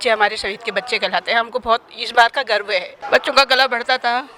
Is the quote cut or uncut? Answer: cut